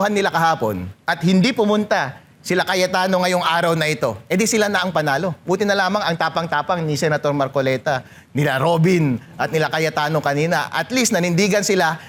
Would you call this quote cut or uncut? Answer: uncut